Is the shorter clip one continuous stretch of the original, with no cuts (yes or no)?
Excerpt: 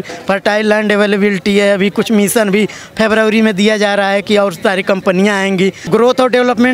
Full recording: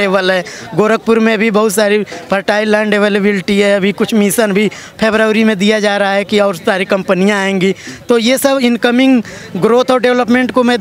no